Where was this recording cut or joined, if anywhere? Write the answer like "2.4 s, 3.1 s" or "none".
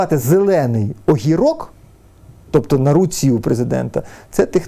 none